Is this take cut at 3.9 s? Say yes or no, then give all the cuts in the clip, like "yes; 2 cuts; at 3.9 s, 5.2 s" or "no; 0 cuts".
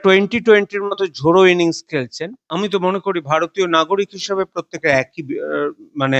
no; 1 cut; at 2.4 s